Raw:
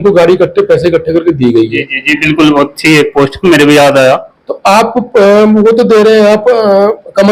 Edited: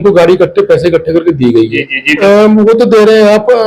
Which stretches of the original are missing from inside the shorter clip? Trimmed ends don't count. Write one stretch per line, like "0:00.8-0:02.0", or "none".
0:02.2-0:05.2

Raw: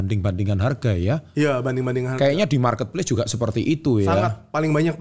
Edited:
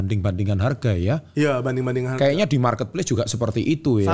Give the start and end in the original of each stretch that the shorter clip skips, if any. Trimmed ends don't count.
none

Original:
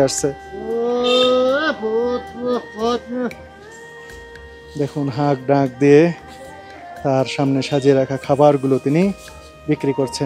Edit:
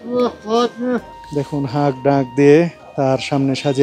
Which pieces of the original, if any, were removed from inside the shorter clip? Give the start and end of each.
0:03.5-0:04.6
0:06.3-0:06.9

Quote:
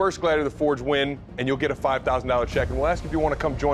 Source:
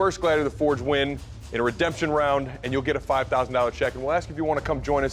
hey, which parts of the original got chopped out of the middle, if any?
0:01.3-0:02.6

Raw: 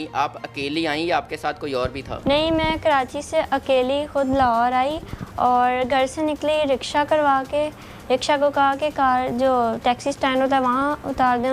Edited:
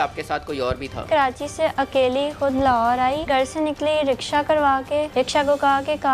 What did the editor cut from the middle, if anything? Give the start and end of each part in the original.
0:02.2-0:02.8
0:05.0-0:05.9
0:07.7-0:08.0

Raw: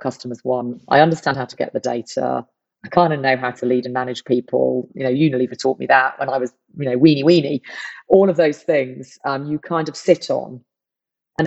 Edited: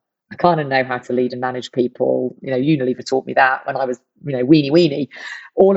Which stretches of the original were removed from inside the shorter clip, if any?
none

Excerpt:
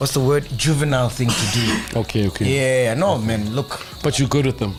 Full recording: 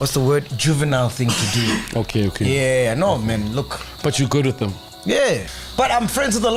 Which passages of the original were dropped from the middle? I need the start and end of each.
none

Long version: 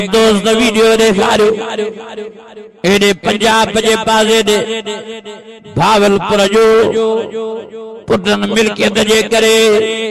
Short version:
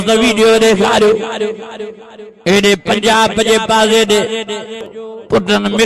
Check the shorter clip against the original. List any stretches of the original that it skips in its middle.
0:05.3-0:07.7

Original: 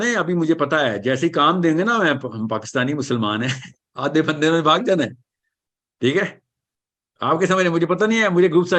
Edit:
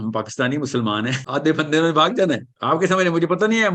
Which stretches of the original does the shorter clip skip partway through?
0:03.6-0:03.9
0:05.2-0:07.1

